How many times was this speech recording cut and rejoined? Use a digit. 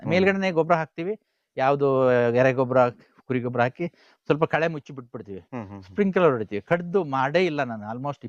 0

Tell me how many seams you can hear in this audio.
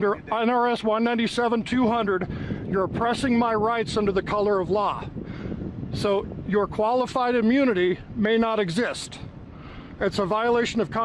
0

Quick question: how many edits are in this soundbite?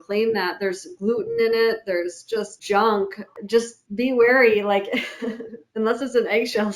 2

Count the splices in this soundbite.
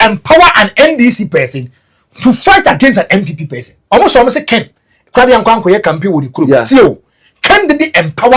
1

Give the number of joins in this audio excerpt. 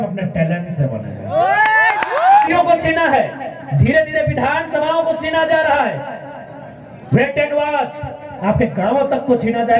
1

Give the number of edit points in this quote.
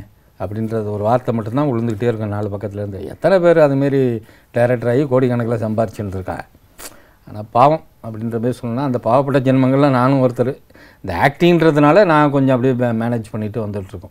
0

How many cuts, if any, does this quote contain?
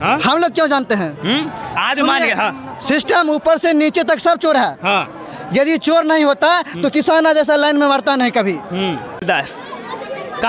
1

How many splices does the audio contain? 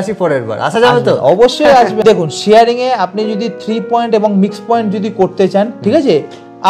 1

